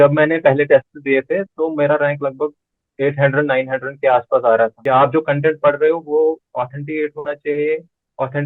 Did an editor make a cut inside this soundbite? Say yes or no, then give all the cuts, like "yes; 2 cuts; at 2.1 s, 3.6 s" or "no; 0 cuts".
yes; 1 cut; at 4.8 s